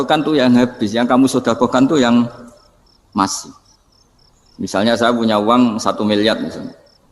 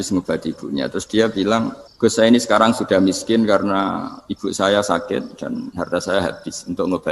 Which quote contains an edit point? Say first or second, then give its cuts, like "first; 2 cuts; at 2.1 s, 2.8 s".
second; 1 cut; at 1.8 s